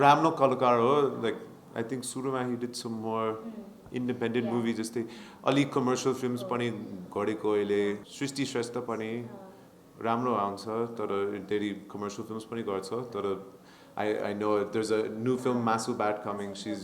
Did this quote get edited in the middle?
yes; 1 cut; at 8.1 s

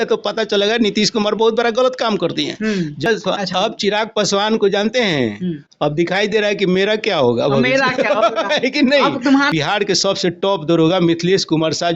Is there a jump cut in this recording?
yes; 2 cuts; at 3.0 s, 9.5 s

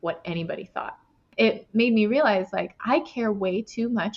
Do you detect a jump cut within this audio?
yes; 1 cut; at 1.2 s

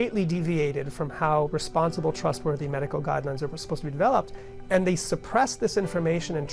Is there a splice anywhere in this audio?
no; 0 cuts

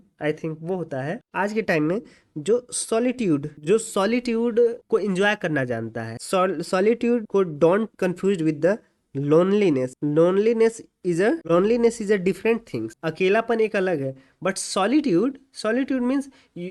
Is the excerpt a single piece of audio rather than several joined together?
yes; 0 cuts

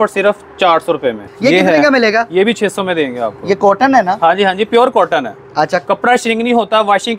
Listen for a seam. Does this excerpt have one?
yes; 1 cut; at 1.3 s

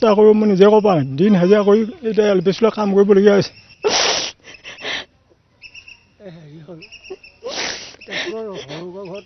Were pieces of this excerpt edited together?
yes; 1 cut; at 3.7 s

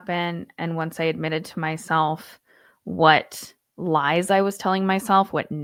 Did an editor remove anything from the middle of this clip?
no; 0 cuts

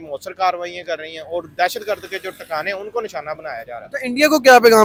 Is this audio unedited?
yes; 0 cuts

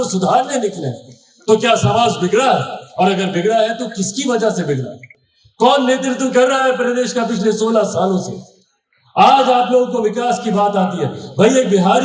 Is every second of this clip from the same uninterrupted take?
yes; 0 cuts

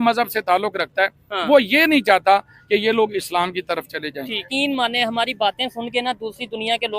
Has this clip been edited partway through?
yes; 1 cut; at 4.5 s

